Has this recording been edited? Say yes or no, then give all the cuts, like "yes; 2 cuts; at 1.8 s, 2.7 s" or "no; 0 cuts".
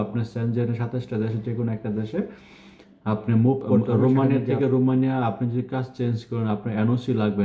yes; 1 cut; at 4.1 s